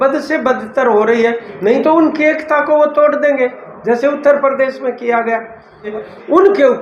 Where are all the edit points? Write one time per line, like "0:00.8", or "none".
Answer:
0:05.9